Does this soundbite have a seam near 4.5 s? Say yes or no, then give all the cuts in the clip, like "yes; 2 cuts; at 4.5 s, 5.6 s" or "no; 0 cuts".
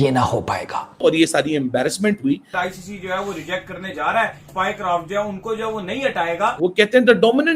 yes; 4 cuts; at 0.9 s, 2.6 s, 4.5 s, 6.8 s